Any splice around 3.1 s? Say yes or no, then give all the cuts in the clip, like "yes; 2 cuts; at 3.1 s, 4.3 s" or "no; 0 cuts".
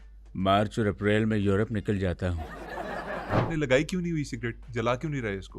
yes; 1 cut; at 3.1 s